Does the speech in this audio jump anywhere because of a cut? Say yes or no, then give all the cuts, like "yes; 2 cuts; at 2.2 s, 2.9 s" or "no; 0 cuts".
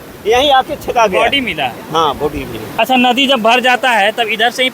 yes; 1 cut; at 2.6 s